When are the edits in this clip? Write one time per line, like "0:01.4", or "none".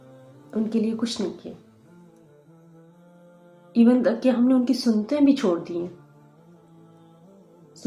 0:02.0
0:03.5